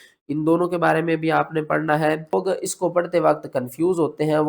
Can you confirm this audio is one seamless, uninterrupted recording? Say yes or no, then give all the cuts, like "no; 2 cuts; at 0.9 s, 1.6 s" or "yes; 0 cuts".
no; 1 cut; at 2.3 s